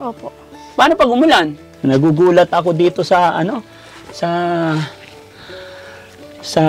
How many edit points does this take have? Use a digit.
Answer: 1